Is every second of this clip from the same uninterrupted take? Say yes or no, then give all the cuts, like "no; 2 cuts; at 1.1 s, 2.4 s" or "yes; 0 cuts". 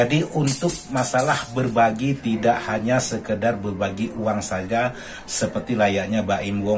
yes; 0 cuts